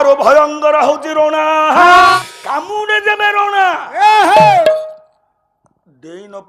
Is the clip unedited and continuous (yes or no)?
no